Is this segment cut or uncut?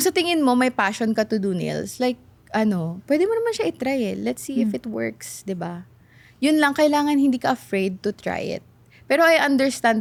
uncut